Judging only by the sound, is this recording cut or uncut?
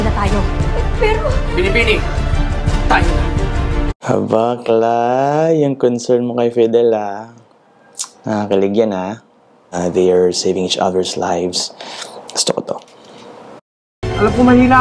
cut